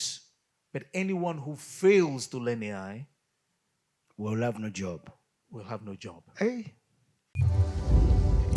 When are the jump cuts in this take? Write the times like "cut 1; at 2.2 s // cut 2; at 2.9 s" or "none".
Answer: cut 1; at 7.4 s